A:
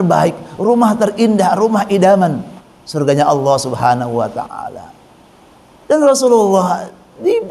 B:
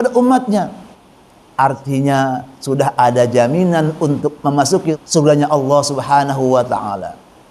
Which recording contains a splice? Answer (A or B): B